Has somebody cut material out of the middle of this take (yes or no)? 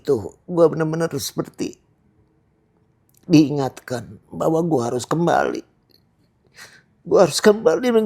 no